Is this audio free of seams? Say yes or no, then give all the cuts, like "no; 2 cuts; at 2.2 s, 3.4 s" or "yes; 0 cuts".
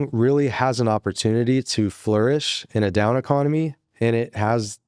yes; 0 cuts